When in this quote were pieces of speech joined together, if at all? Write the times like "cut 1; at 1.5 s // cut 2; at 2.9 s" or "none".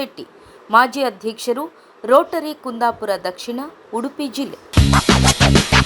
cut 1; at 4.7 s